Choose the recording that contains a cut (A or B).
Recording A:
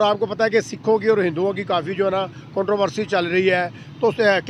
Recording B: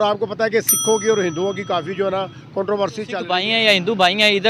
B